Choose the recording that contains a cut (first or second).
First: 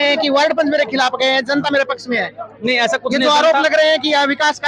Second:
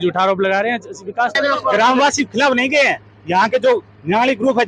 second